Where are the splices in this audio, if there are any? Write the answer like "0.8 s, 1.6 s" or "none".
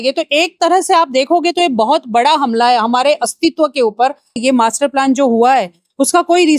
4.4 s

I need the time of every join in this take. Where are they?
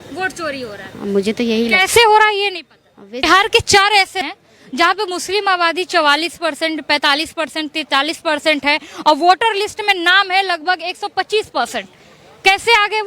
3.2 s

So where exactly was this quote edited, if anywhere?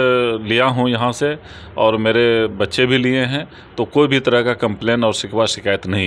none

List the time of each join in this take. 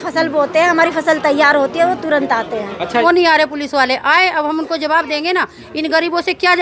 3.0 s

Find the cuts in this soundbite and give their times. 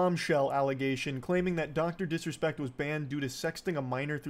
1.6 s

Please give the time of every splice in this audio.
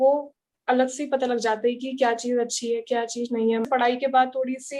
3.7 s

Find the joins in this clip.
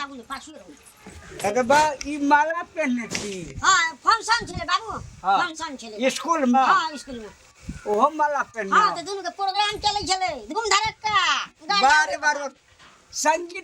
none

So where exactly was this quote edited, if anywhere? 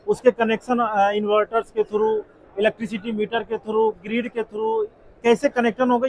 none

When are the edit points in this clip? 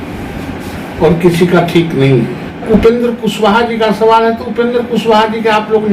2.7 s

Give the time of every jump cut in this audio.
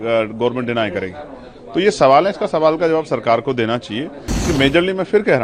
4.3 s

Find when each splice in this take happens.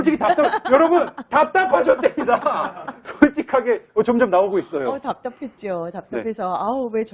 5.5 s

